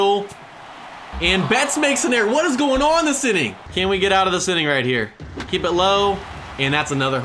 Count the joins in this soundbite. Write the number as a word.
one